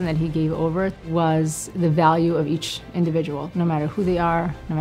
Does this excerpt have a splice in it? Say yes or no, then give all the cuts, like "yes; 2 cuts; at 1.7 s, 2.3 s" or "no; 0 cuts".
yes; 3 cuts; at 1.0 s, 1.6 s, 3.4 s